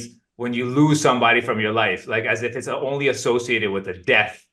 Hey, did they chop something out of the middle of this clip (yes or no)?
no